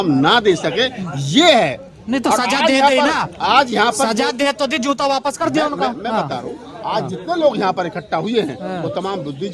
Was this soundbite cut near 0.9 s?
no; 0 cuts

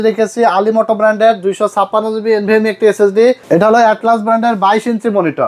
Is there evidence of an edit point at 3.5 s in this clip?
yes; 1 cut; at 3.5 s

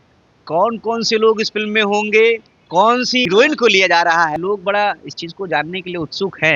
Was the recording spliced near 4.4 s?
yes; 2 cuts; at 3.2 s, 4.4 s

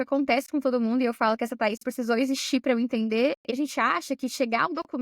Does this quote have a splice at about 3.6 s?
yes; 1 cut; at 3.6 s

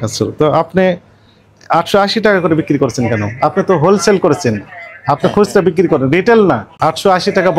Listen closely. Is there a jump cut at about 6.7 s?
yes; 1 cut; at 6.7 s

